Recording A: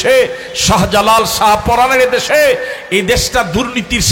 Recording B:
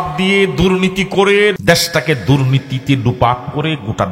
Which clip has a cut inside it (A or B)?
B